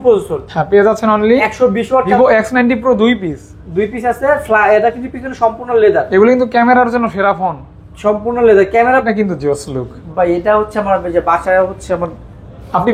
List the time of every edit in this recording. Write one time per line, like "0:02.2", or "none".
0:02.1
0:09.0

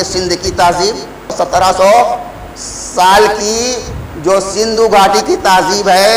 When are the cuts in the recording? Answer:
0:01.4

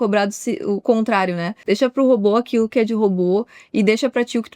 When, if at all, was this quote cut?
0:01.5

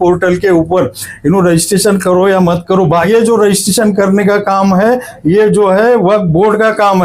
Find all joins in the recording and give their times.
0:03.1

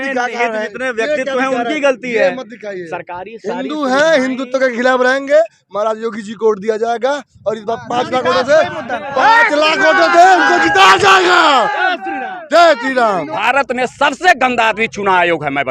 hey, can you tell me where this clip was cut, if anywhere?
0:13.4

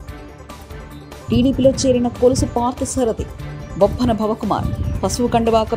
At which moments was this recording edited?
0:01.0

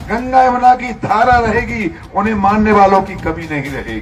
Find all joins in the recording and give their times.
none

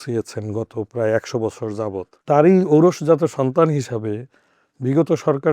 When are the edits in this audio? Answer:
0:02.1

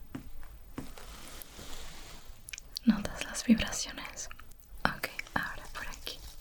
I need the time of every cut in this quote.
0:05.0

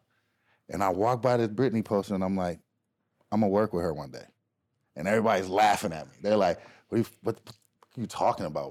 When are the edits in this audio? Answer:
none

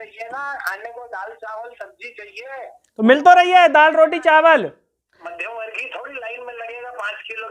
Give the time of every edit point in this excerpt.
0:05.0

